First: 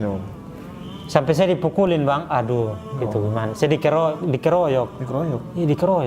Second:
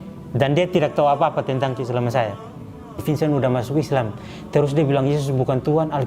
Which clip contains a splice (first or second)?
second